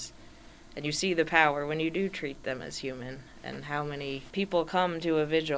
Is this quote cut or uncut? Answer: cut